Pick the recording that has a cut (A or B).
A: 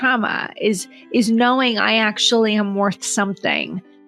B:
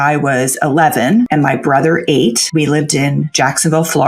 B